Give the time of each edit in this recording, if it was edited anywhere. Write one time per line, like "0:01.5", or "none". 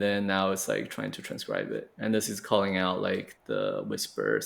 0:03.3